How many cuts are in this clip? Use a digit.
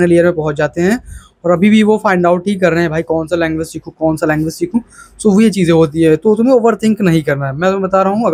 0